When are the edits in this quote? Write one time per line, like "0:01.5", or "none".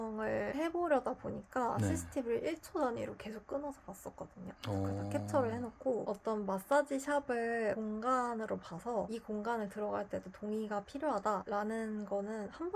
0:06.0